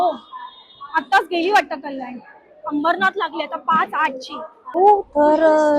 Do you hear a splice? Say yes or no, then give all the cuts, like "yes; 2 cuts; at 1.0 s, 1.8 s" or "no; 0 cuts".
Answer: yes; 1 cut; at 4.8 s